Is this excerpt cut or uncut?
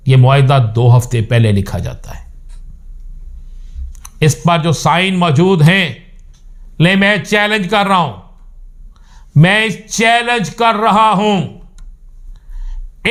uncut